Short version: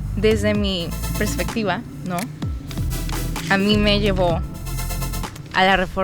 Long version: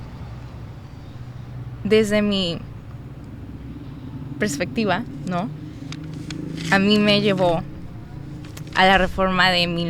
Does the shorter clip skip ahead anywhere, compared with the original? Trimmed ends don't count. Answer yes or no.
yes